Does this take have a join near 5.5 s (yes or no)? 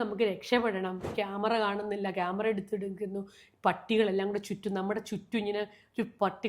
no